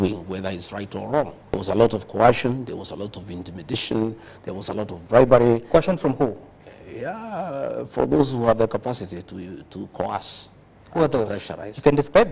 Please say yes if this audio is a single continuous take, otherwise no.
no